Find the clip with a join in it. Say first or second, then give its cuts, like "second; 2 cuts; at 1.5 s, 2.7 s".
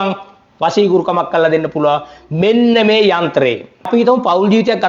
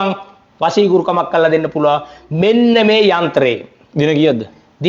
first; 1 cut; at 3.9 s